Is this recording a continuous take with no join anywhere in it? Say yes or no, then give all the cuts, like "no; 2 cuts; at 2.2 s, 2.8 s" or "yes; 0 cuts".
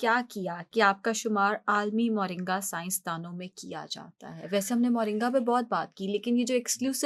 yes; 0 cuts